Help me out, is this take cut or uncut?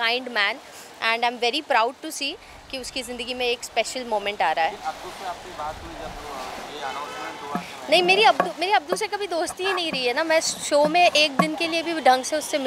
uncut